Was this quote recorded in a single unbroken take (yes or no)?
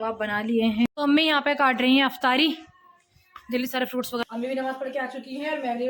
no